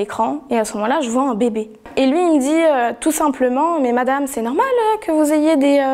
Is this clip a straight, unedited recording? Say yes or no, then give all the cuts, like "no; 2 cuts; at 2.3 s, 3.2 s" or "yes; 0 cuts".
no; 1 cut; at 1.8 s